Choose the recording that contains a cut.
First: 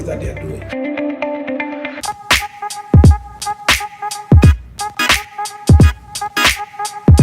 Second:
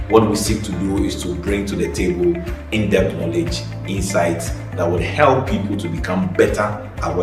first; 1 cut; at 2.0 s

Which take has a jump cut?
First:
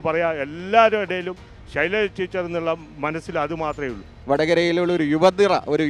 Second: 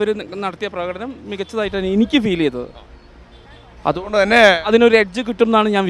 first; 1 cut; at 4.1 s

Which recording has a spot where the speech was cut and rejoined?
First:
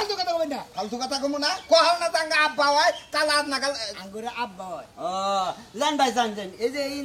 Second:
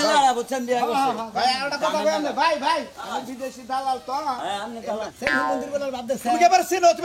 second; 1 cut; at 5.1 s

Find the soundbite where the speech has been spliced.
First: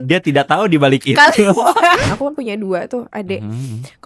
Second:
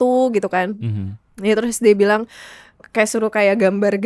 first; 1 cut; at 2.0 s

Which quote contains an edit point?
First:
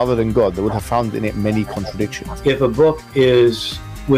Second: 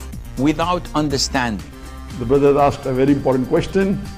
first; 1 cut; at 2.6 s

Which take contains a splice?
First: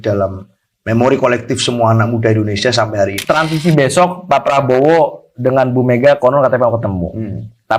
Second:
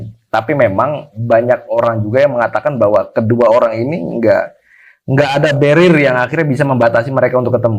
first; 1 cut; at 3.2 s

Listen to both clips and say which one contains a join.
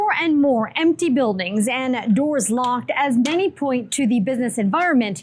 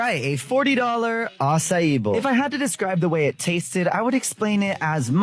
second; 1 cut; at 2.2 s

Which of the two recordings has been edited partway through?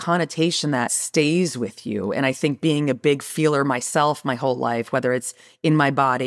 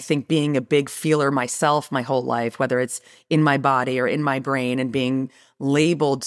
first; 1 cut; at 1.0 s

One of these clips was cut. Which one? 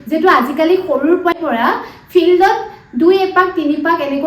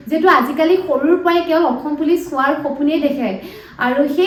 first; 1 cut; at 1.3 s

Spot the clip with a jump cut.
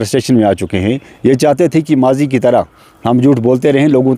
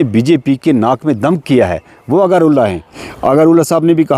second; 1 cut; at 2.9 s

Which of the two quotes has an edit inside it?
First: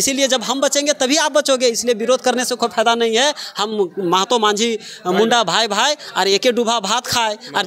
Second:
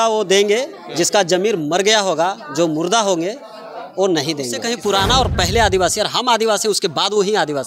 second; 1 cut; at 4.6 s

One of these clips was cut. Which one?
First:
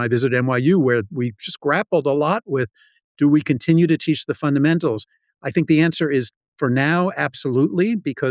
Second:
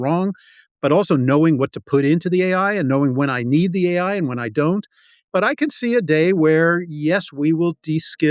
second; 1 cut; at 5.2 s

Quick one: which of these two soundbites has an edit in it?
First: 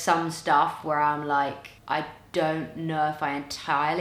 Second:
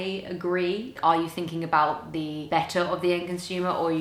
second; 2 cuts; at 0.9 s, 2.4 s

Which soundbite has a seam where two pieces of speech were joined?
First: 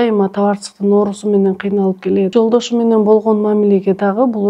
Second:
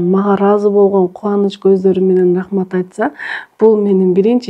first; 1 cut; at 2.3 s

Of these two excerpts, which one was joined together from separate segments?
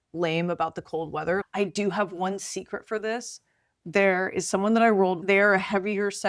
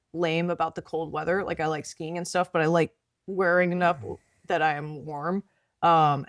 first; 2 cuts; at 1.4 s, 5.2 s

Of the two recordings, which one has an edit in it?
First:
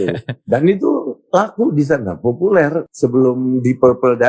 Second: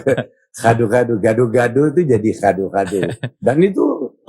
first; 1 cut; at 2.9 s

